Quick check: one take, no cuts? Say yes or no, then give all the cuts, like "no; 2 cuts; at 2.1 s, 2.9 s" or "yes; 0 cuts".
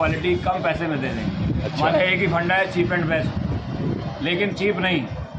yes; 0 cuts